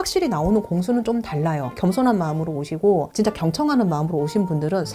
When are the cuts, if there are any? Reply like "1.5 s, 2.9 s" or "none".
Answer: 1.8 s